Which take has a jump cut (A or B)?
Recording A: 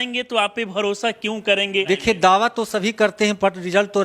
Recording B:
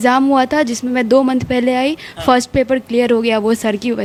A